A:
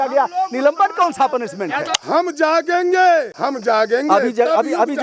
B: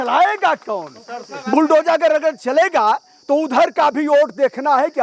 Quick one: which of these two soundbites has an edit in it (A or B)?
A